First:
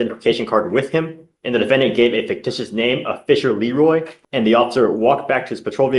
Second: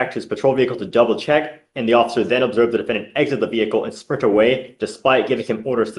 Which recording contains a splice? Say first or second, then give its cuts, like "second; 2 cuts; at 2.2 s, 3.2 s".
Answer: first; 1 cut; at 4.1 s